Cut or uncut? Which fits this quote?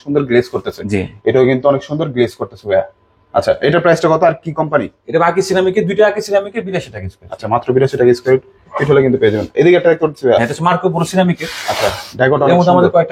uncut